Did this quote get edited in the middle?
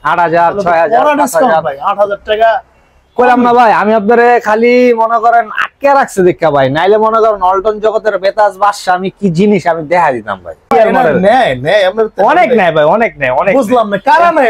yes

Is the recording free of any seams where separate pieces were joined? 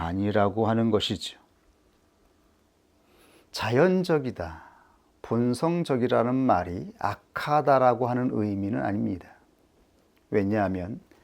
no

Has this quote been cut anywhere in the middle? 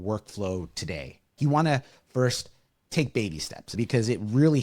yes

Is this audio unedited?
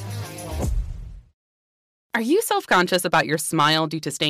no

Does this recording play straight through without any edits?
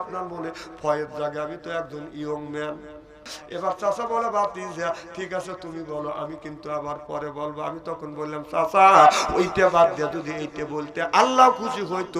no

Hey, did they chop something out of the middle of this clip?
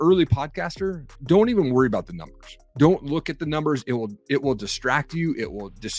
no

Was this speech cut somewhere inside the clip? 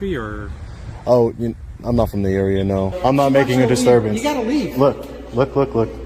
yes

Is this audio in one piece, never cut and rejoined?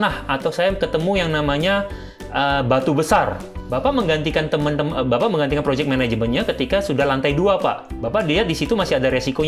no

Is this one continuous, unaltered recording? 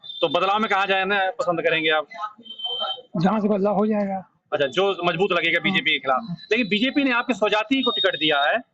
yes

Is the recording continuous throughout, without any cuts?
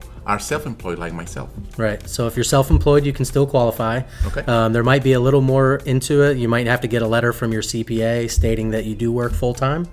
yes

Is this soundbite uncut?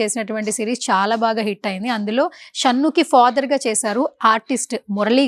yes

